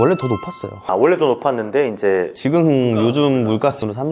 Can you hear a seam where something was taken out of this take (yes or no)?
no